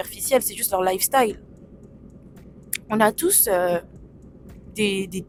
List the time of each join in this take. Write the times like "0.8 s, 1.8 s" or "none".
none